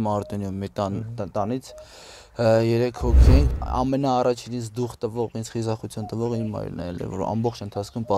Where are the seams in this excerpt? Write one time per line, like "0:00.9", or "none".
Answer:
0:03.5